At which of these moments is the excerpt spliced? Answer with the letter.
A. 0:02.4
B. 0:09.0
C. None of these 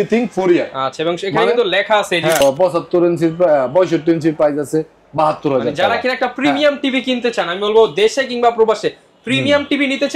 A